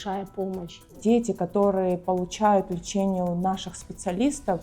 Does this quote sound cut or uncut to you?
cut